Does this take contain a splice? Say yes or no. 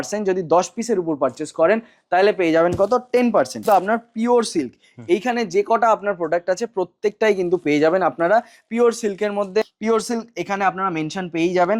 yes